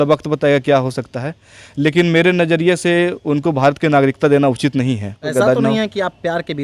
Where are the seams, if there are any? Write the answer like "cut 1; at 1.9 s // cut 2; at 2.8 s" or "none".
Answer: cut 1; at 5.3 s